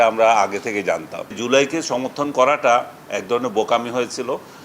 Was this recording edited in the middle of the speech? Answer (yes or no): yes